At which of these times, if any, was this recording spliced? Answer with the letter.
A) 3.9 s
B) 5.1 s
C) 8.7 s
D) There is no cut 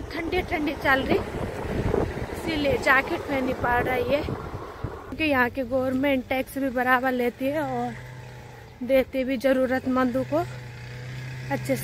B